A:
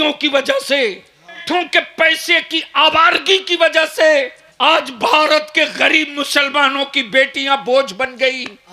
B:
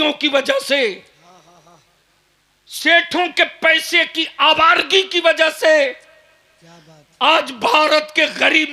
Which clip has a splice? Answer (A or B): A